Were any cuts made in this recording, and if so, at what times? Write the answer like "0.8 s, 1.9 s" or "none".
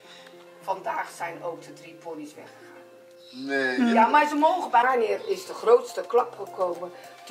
4.8 s